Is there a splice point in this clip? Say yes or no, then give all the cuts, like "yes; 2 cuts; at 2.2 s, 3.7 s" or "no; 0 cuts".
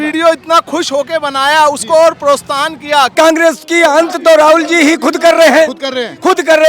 yes; 1 cut; at 3.1 s